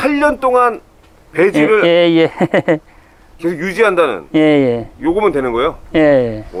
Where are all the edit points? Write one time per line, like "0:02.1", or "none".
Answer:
none